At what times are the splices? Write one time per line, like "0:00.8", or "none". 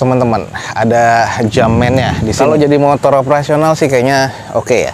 0:02.3